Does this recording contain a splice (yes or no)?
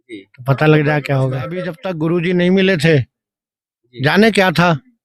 yes